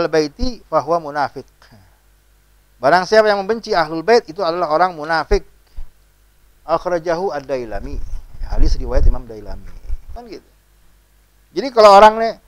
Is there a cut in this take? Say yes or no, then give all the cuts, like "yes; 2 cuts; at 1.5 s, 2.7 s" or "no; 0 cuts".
yes; 1 cut; at 10.1 s